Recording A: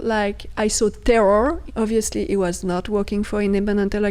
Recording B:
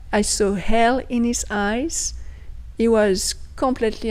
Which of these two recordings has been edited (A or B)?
A